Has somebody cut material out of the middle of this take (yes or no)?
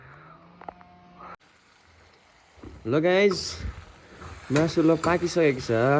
yes